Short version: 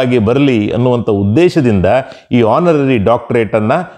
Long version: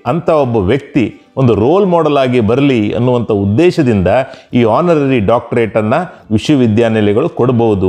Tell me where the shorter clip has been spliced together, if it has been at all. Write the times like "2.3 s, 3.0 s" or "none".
none

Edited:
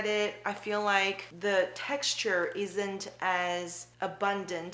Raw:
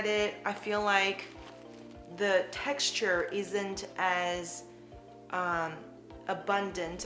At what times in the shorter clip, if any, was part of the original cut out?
1.3 s, 3.8 s

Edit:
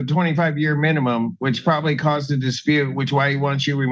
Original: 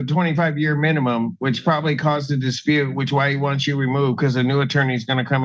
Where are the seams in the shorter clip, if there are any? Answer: none

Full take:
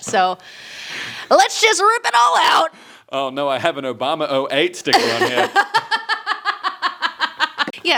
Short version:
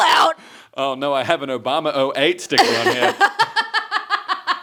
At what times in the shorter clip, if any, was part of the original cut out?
none

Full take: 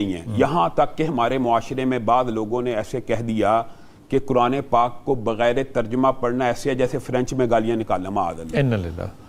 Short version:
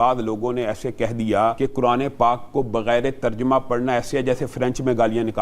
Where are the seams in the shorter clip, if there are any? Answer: 1.6 s

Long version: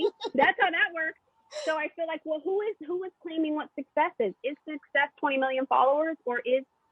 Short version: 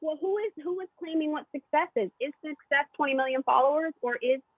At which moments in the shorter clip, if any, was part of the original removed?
none

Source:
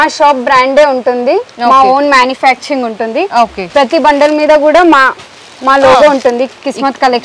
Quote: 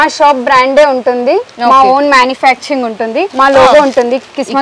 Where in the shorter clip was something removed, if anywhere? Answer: 3.2 s

